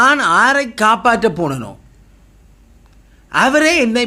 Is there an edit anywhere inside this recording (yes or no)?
no